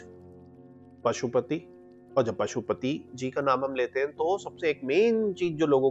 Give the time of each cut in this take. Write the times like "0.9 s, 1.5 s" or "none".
none